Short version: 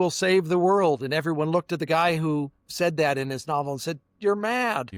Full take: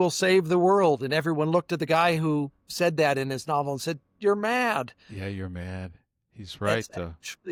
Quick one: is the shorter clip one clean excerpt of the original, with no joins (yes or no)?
yes